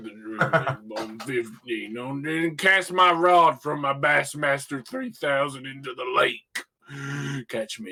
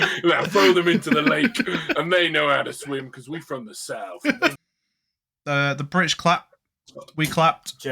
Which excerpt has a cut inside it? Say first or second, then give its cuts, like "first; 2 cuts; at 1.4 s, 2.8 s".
second; 1 cut; at 4.6 s